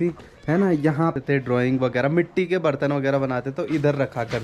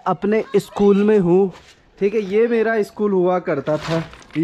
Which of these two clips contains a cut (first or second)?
first